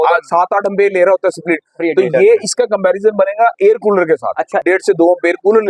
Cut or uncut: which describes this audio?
cut